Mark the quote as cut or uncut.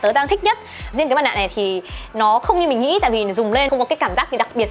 cut